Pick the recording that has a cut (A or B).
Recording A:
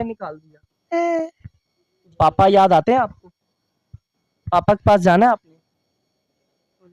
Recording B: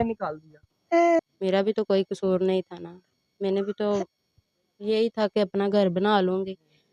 B